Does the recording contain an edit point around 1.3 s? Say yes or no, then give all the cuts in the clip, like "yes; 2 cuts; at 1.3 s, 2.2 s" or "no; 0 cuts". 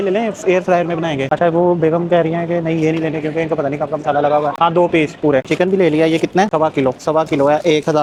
no; 0 cuts